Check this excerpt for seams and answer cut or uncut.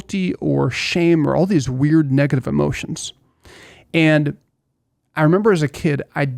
uncut